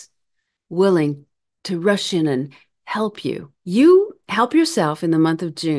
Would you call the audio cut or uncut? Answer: cut